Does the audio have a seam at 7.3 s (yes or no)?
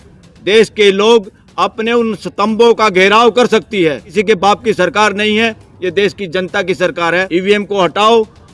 yes